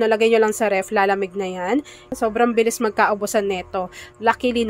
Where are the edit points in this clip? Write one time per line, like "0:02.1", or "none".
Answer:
0:02.2